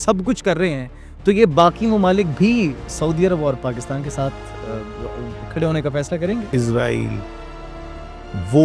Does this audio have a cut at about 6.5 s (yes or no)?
yes